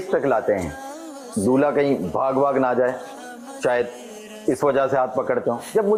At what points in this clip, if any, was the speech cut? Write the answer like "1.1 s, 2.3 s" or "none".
none